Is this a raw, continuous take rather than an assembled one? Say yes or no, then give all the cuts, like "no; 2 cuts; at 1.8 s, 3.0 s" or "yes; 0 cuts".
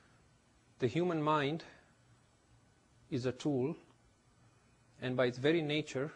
no; 1 cut; at 1.1 s